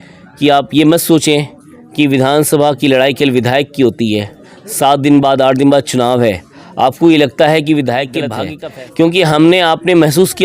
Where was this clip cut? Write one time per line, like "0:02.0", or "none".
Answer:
0:08.4